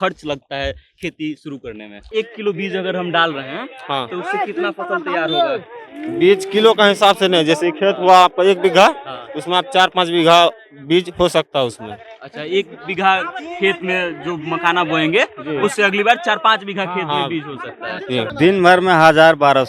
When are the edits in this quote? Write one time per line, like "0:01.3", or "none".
0:02.1
0:18.3